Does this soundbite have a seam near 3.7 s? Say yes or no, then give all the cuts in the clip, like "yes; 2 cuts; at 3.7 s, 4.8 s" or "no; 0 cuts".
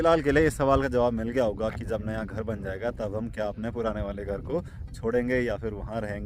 no; 0 cuts